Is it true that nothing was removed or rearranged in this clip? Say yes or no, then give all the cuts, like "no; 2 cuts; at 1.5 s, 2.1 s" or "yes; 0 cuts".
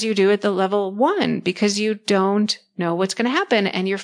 yes; 0 cuts